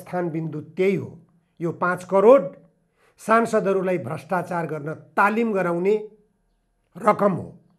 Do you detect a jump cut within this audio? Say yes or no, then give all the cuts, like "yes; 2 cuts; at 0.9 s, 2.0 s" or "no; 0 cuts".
no; 0 cuts